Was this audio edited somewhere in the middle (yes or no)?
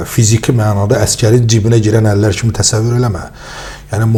no